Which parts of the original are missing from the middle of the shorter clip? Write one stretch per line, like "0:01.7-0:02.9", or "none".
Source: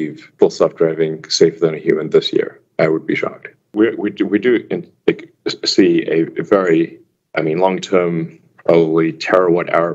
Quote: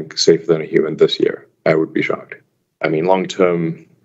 0:03.6-0:07.0